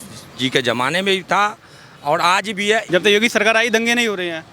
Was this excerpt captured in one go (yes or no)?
yes